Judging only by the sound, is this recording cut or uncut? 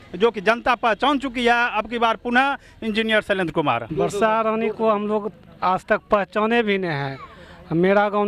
uncut